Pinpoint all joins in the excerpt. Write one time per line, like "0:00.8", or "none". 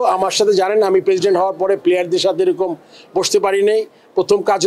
none